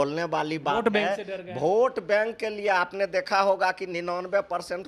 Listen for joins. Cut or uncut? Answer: uncut